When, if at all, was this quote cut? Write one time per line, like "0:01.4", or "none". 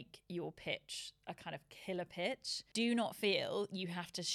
0:02.7